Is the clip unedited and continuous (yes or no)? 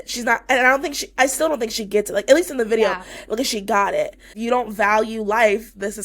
no